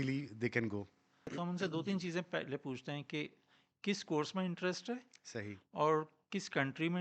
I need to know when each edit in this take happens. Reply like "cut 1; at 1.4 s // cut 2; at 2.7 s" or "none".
cut 1; at 1.3 s